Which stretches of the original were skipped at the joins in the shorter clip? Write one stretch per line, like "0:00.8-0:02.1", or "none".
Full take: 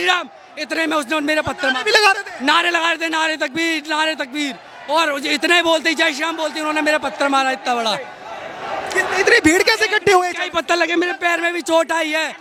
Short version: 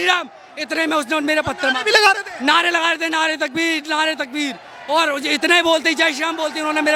none